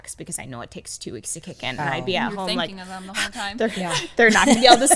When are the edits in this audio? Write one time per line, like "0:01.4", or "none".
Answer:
none